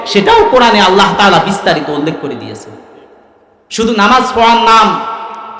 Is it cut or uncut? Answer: uncut